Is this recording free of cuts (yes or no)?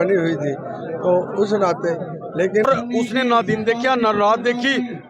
no